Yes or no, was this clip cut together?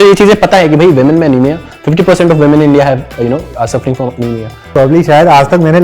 yes